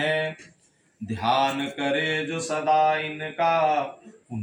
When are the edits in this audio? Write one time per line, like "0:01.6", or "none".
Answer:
none